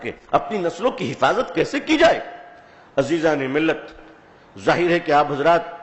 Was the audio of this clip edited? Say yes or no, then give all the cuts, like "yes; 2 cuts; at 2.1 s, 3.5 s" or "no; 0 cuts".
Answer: no; 0 cuts